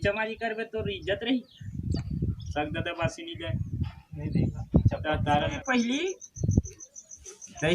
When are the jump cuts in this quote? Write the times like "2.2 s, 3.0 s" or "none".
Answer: 5.6 s